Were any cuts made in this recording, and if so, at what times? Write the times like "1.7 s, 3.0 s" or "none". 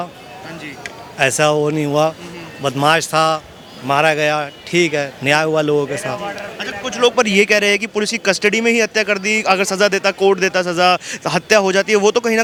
none